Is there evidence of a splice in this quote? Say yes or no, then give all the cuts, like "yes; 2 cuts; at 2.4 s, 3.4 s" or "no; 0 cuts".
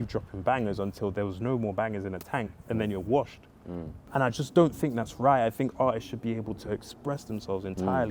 no; 0 cuts